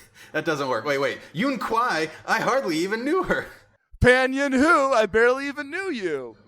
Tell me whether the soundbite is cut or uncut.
cut